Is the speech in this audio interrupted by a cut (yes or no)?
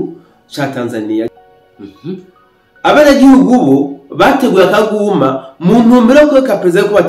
yes